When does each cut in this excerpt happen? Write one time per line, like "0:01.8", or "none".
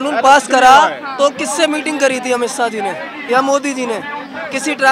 none